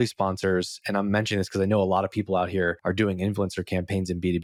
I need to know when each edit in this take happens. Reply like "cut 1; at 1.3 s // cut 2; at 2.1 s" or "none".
none